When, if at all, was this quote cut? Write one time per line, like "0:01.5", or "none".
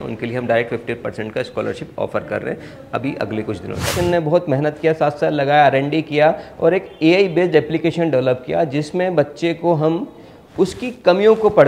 0:04.0